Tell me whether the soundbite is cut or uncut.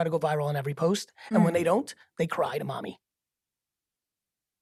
uncut